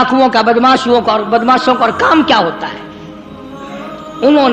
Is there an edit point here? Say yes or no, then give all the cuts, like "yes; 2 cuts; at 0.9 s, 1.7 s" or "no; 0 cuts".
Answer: no; 0 cuts